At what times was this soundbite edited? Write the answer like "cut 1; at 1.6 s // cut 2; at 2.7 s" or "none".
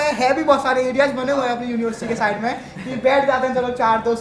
none